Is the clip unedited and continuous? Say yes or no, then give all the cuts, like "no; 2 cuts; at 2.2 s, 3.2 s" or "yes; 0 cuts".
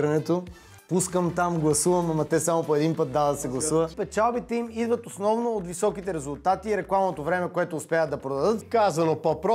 no; 2 cuts; at 3.9 s, 8.6 s